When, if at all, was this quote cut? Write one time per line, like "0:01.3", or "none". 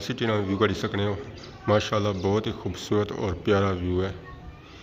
none